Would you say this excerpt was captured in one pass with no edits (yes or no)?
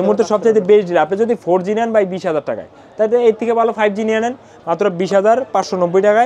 yes